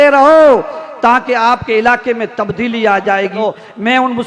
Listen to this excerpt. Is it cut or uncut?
cut